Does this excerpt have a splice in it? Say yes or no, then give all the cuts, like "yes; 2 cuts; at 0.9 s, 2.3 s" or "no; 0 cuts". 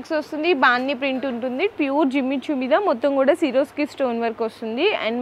yes; 1 cut; at 1.7 s